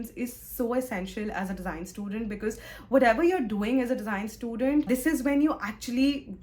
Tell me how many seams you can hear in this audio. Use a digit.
0